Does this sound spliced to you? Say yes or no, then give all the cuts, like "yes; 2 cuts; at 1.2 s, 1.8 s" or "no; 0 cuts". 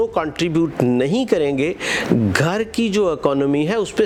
no; 0 cuts